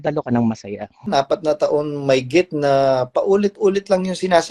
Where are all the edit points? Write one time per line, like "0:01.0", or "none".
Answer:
0:01.1